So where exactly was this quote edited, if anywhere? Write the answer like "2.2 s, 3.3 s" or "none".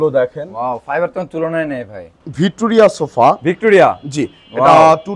2.2 s